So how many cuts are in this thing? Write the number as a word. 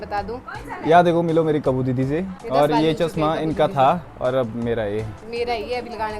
one